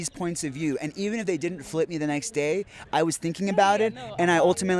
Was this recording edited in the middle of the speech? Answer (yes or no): no